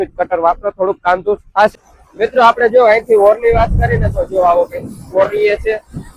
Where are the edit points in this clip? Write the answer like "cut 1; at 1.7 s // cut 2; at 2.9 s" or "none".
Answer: cut 1; at 1.7 s